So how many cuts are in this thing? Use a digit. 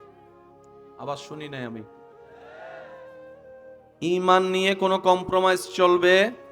1